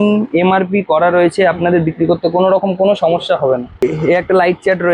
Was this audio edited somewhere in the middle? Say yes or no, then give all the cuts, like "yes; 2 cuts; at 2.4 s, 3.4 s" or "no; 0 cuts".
yes; 1 cut; at 3.8 s